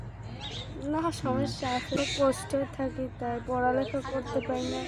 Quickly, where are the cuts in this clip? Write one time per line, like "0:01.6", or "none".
0:02.0